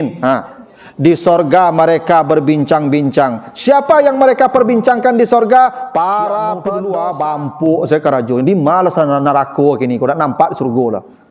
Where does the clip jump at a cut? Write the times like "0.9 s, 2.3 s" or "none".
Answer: 6.7 s